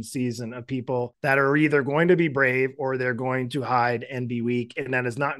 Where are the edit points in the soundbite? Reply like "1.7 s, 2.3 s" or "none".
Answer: 1.1 s